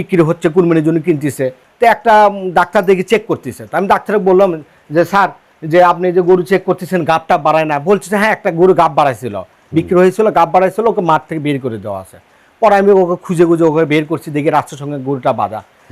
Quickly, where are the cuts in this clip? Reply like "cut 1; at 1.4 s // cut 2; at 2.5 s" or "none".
none